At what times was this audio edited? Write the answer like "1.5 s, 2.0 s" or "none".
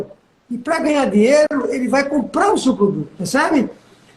1.5 s, 3.1 s

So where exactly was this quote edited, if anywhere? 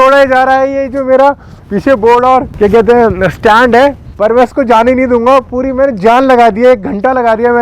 2.5 s, 4.1 s

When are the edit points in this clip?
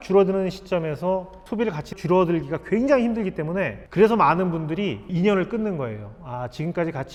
none

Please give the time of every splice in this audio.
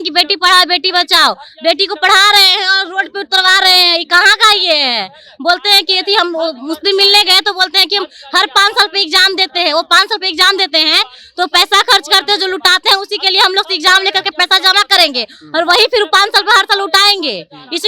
none

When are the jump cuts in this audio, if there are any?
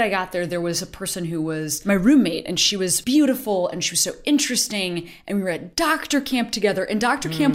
1.8 s, 3.0 s

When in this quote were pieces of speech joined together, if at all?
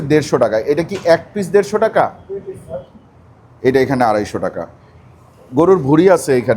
3.0 s

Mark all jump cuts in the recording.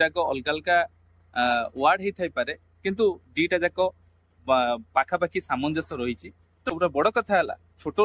6.5 s

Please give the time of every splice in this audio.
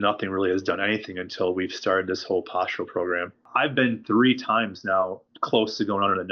3.4 s, 5.3 s

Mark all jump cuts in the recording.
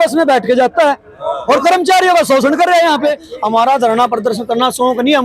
3.3 s

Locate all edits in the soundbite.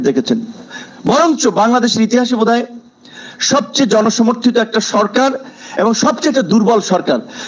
none

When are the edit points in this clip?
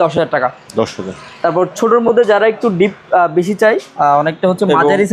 none

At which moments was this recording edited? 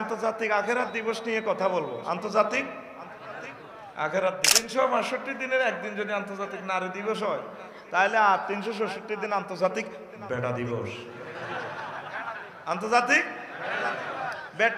4.6 s

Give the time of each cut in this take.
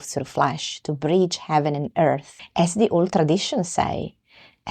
2.3 s

